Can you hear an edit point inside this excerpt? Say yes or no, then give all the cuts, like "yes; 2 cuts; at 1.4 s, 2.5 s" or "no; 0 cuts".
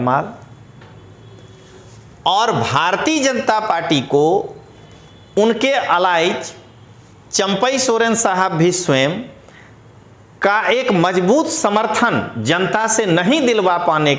no; 0 cuts